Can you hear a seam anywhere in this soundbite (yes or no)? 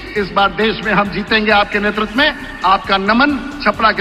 no